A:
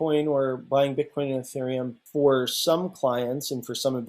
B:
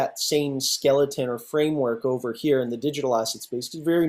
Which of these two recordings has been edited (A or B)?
A